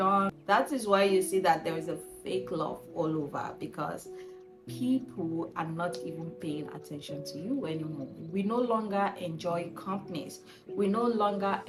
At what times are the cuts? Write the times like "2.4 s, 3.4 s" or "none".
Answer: none